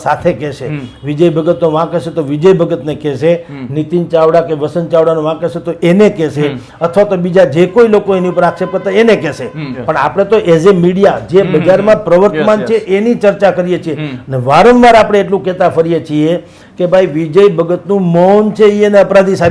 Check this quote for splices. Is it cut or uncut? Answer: uncut